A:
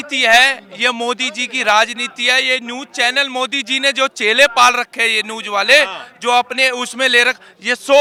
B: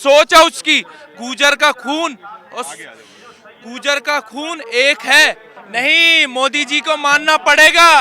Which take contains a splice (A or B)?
B